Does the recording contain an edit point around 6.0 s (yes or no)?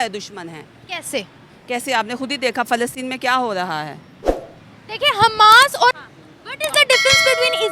yes